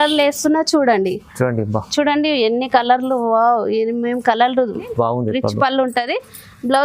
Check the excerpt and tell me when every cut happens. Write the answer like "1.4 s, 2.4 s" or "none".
4.9 s